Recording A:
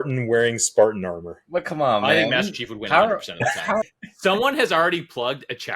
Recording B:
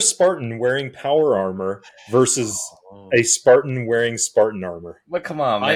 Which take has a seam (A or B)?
A